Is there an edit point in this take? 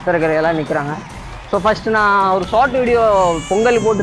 no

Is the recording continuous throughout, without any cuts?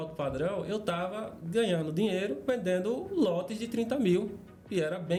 yes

